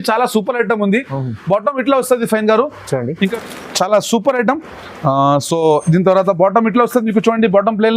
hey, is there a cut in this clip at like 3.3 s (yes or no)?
yes